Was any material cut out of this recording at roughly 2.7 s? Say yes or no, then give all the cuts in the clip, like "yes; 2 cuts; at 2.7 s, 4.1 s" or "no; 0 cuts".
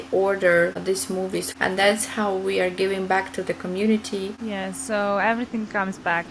no; 2 cuts; at 1.2 s, 4.4 s